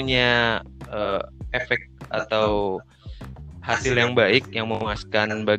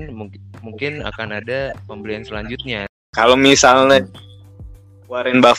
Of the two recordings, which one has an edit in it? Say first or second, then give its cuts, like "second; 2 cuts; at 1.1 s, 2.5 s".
second; 1 cut; at 3.1 s